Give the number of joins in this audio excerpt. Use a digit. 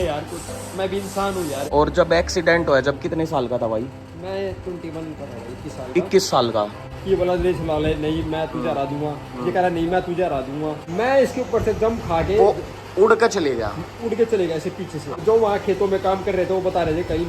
4